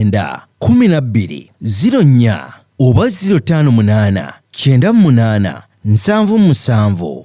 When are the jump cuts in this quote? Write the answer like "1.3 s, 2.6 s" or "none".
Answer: none